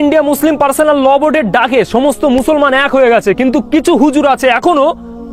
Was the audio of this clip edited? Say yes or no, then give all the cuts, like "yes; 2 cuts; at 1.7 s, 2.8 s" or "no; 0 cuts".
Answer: no; 0 cuts